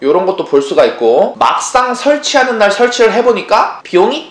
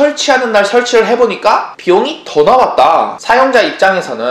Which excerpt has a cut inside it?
second; 1 cut; at 3.2 s

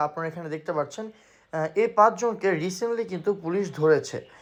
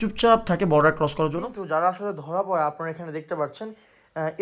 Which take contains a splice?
second; 1 cut; at 1.5 s

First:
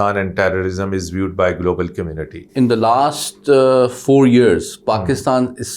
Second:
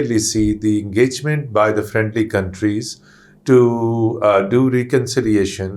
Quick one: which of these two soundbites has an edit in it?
first; 1 cut; at 2.5 s

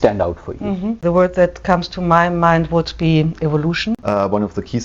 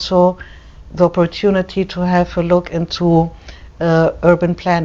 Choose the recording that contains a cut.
first; 2 cuts; at 1.0 s, 3.9 s

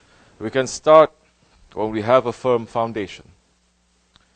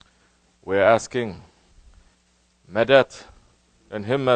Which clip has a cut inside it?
first; 1 cut; at 3.2 s

